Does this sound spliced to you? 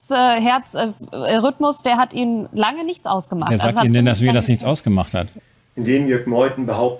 no; 0 cuts

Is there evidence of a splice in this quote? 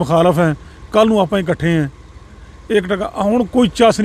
no; 0 cuts

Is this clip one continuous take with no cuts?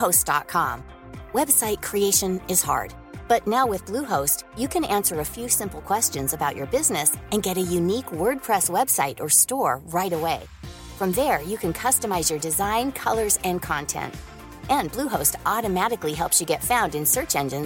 yes; 0 cuts

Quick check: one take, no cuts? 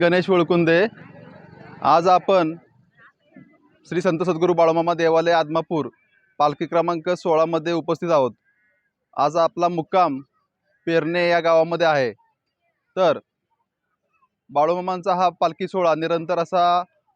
yes; 0 cuts

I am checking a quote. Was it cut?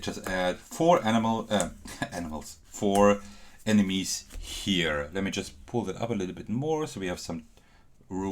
no; 0 cuts

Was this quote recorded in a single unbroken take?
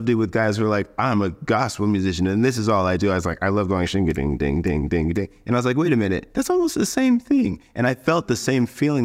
no; 1 cut; at 6.3 s

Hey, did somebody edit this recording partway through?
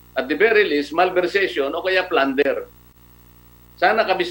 no; 0 cuts

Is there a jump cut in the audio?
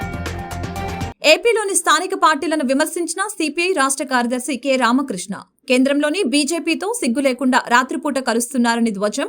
yes; 1 cut; at 1.0 s

